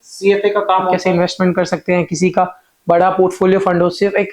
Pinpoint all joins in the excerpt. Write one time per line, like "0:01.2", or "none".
0:01.0